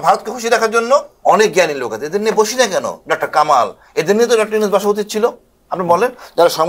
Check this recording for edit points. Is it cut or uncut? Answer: cut